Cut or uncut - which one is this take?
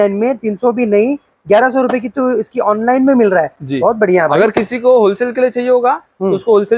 uncut